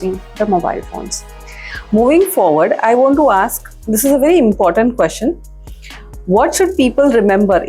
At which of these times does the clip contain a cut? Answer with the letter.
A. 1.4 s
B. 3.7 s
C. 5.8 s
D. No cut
A